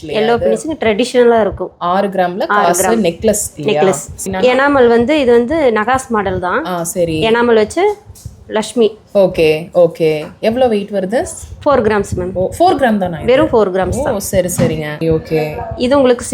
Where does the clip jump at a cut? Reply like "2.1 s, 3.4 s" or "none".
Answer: 4.2 s, 15.0 s

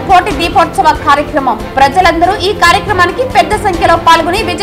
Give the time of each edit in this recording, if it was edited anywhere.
none

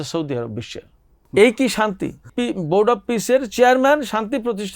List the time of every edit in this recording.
1.1 s, 2.3 s

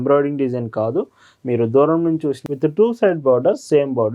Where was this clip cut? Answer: 2.5 s

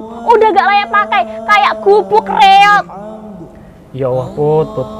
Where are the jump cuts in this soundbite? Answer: none

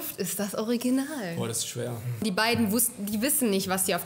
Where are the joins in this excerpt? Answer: 2.2 s

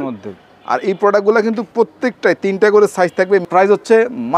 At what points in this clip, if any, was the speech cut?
3.5 s

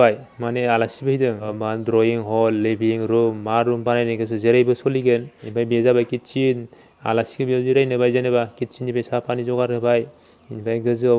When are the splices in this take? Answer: 1.5 s, 5.4 s

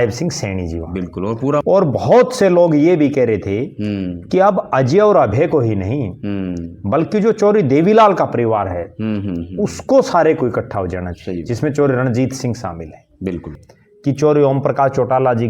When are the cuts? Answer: 1.6 s, 13.6 s

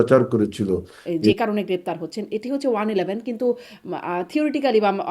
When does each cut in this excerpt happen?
1.3 s

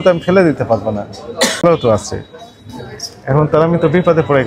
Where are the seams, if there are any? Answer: 1.6 s

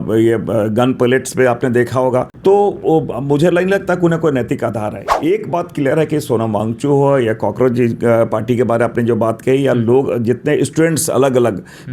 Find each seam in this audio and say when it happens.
2.3 s, 5.0 s

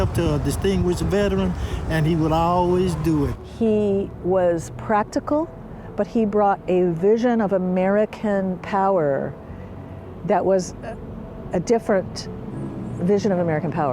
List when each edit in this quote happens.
3.3 s

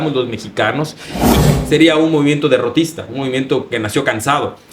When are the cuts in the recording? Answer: 1.3 s

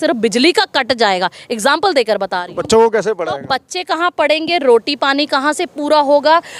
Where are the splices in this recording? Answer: none

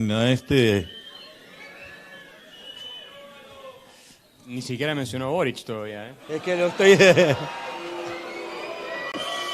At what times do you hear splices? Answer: none

